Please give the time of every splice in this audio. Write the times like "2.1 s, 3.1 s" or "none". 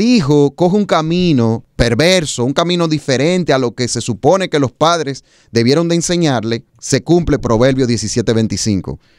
1.7 s, 6.7 s